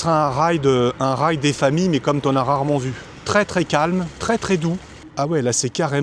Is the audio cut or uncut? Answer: cut